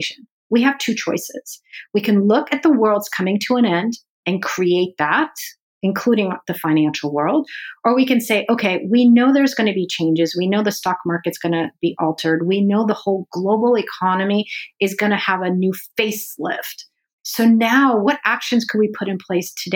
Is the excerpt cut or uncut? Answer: cut